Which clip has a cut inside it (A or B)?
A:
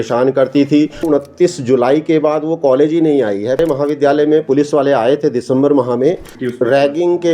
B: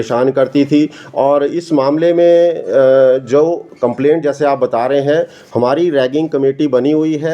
A